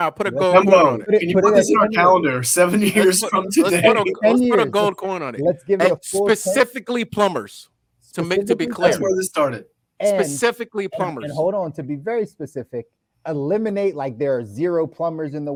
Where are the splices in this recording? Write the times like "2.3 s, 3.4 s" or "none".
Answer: none